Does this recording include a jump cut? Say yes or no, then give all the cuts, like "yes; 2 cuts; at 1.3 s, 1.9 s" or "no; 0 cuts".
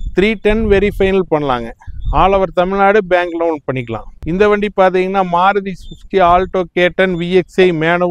no; 0 cuts